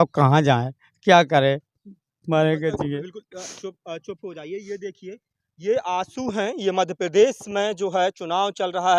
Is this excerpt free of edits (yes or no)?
yes